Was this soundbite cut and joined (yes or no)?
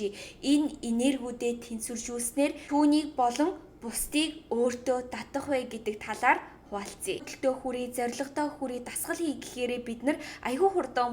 yes